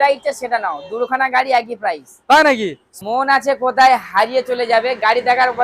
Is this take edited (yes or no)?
yes